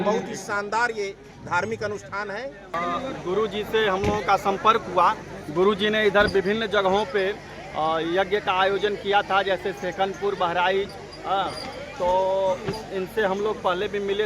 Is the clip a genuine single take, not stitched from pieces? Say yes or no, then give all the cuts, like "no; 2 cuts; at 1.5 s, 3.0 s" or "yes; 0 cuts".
no; 1 cut; at 2.7 s